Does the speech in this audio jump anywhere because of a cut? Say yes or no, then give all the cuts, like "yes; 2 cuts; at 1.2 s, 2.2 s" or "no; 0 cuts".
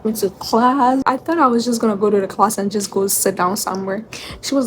yes; 1 cut; at 1.0 s